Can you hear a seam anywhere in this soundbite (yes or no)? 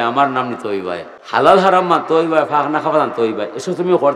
yes